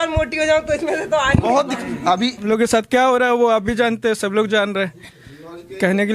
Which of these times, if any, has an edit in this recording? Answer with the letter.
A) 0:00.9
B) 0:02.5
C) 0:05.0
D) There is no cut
B